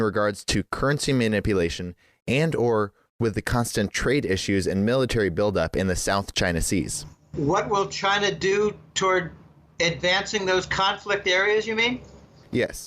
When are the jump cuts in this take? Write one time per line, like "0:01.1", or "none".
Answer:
0:06.5